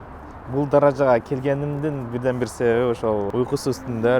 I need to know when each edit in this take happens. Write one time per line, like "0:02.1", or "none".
0:03.3